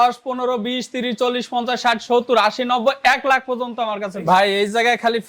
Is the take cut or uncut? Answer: cut